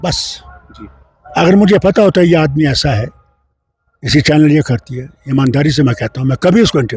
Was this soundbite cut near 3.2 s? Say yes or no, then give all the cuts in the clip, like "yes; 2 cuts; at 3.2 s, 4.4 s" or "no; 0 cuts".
no; 0 cuts